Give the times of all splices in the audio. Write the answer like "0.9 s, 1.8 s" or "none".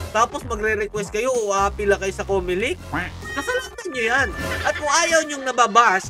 3.2 s